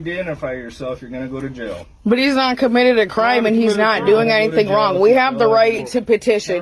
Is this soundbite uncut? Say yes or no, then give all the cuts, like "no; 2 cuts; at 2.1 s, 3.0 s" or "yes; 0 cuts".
yes; 0 cuts